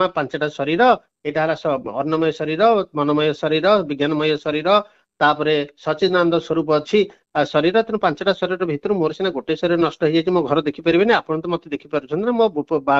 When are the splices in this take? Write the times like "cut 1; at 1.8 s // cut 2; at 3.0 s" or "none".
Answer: none